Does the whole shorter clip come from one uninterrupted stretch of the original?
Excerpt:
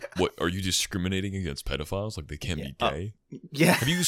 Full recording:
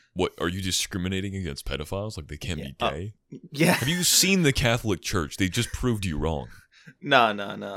yes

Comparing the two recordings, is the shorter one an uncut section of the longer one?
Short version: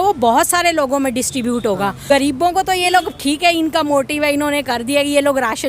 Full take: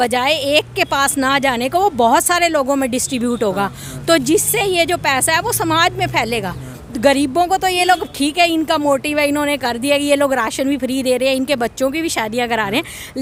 no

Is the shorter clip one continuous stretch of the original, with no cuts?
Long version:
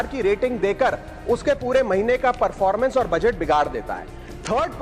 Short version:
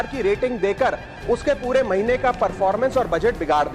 yes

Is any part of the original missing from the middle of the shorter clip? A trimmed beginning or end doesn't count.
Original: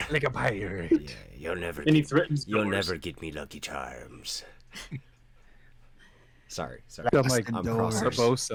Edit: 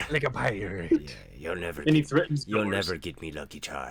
no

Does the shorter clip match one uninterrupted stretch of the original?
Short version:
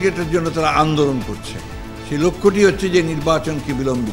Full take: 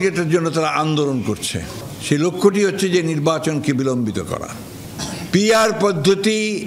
yes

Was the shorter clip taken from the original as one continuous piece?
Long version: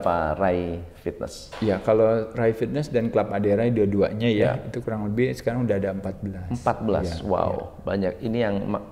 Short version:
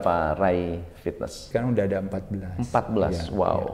no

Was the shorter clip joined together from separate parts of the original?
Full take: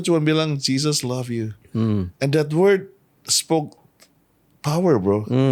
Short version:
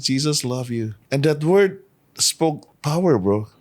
yes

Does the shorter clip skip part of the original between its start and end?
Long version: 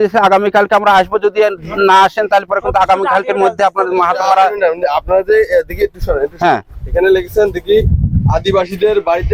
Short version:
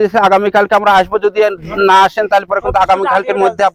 no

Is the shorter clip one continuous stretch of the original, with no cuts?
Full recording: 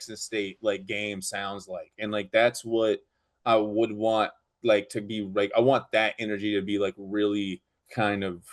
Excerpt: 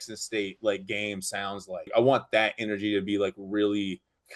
no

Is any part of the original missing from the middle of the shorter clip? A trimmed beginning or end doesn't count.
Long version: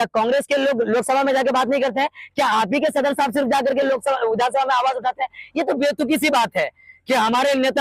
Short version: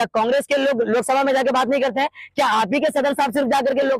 no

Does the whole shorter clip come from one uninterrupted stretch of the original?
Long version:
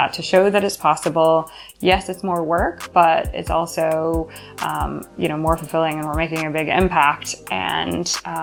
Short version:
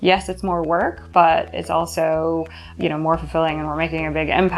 no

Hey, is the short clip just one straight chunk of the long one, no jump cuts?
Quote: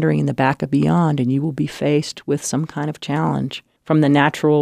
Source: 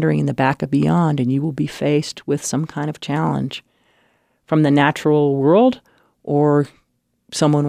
no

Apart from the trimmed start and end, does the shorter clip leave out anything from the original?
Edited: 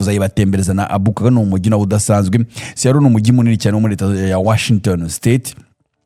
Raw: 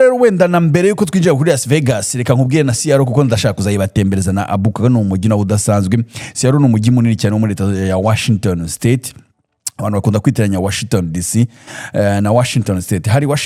no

